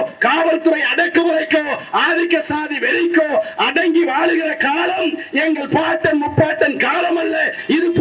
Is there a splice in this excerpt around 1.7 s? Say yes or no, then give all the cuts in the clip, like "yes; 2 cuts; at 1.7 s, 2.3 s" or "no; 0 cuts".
no; 0 cuts